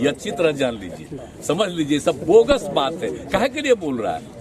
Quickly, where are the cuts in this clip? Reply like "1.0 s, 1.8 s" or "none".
none

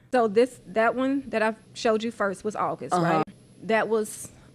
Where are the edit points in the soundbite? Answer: 1.7 s, 3.3 s

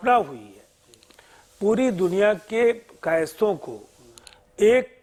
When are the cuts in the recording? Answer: none

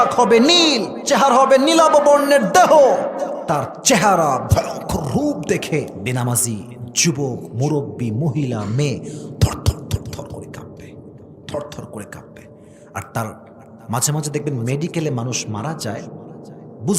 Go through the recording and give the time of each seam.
0.9 s, 3.4 s, 6.0 s

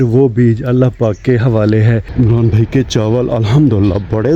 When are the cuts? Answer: 2.1 s

